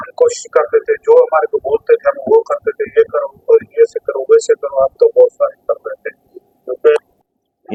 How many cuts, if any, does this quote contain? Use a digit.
0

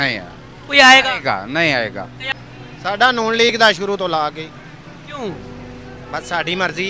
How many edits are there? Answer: 1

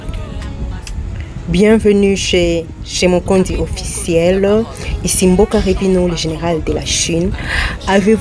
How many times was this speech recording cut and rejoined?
1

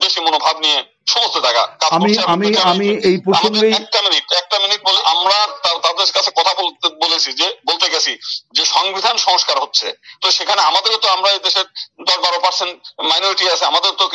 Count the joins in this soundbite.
1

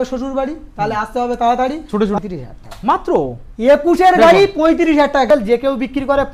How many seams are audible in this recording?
2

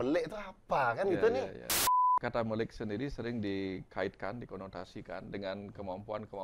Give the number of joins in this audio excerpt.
1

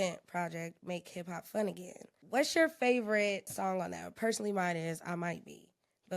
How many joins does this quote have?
2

